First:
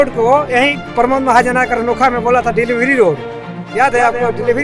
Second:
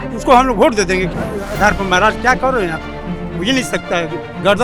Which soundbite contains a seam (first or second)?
second